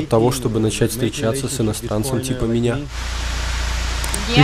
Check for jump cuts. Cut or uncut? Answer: uncut